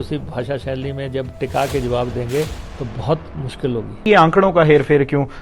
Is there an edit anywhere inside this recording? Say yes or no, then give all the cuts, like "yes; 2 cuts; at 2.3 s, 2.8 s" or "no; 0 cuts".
yes; 1 cut; at 4.0 s